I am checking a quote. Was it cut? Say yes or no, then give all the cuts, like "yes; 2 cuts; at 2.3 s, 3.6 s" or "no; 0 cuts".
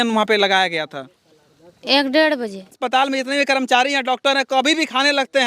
yes; 1 cut; at 2.8 s